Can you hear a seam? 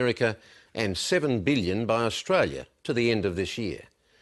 yes; 1 cut; at 2.7 s

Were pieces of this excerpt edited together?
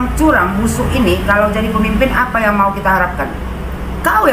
no; 0 cuts

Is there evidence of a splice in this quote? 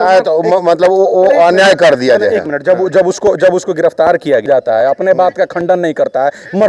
no; 0 cuts

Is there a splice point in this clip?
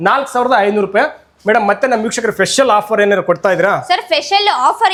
no; 0 cuts

